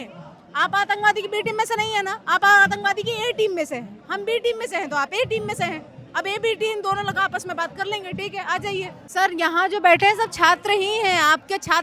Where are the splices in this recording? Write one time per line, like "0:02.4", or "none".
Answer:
0:09.0